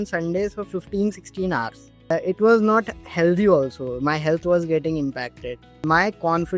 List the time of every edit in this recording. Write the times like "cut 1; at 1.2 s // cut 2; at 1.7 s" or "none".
cut 1; at 2.1 s // cut 2; at 5.8 s